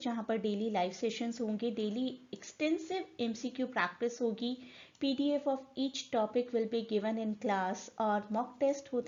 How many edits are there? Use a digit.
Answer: 0